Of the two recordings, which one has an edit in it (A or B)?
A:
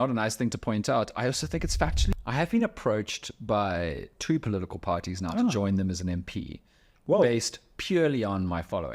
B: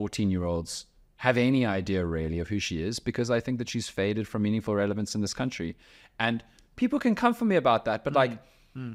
A